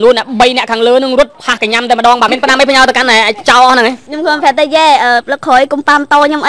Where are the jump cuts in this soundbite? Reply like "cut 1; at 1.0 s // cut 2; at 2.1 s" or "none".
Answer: cut 1; at 2.3 s // cut 2; at 4.1 s